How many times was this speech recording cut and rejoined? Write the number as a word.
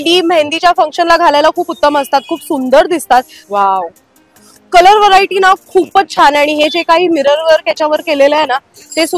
one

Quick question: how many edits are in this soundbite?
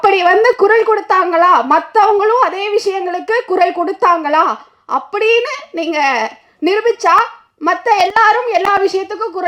zero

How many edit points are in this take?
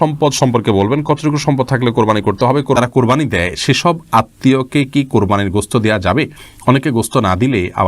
one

